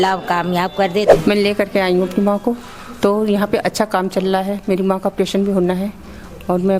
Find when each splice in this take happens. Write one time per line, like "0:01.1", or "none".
none